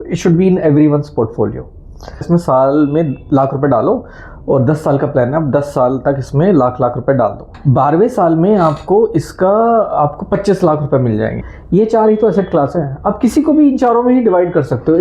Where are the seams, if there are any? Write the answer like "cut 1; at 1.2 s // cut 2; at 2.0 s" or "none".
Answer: cut 1; at 2.2 s // cut 2; at 7.5 s // cut 3; at 11.4 s